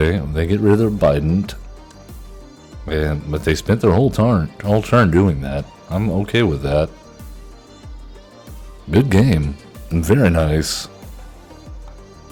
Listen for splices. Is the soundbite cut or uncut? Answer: uncut